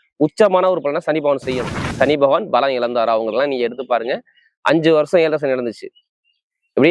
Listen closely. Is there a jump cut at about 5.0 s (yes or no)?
no